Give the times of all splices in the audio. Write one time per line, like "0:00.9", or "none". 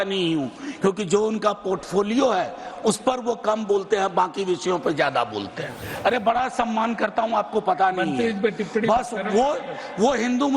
0:05.8